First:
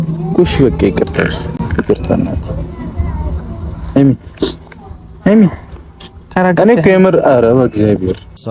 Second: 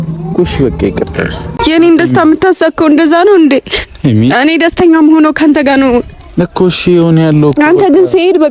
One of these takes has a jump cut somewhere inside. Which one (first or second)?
second